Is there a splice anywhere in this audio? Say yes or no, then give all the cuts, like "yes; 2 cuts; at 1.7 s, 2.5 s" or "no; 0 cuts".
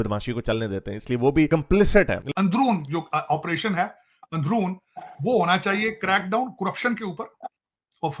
yes; 1 cut; at 2.3 s